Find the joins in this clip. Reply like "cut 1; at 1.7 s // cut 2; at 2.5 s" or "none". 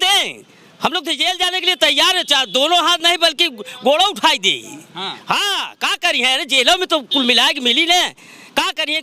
none